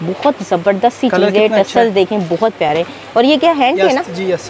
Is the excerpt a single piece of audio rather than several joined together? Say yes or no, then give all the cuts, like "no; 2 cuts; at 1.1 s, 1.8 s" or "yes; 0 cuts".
yes; 0 cuts